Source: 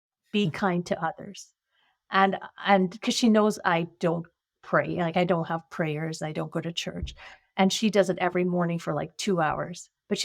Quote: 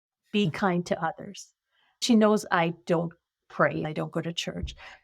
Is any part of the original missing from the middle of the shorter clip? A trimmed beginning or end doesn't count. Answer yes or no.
yes